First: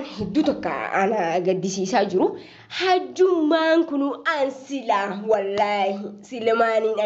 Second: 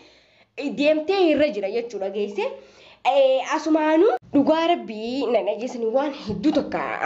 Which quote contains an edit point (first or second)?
second